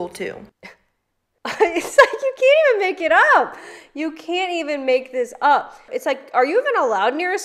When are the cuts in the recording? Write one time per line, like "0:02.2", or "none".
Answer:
0:05.9